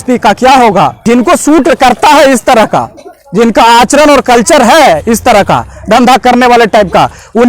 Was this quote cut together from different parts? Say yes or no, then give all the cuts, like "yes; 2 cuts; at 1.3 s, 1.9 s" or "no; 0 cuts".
yes; 1 cut; at 1.0 s